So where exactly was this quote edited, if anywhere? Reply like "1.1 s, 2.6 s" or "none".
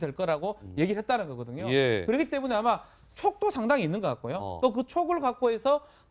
2.8 s